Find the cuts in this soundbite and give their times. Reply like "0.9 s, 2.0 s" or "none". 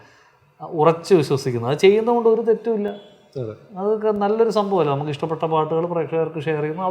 none